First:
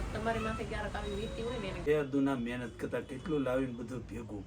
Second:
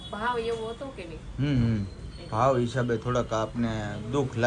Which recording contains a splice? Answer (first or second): first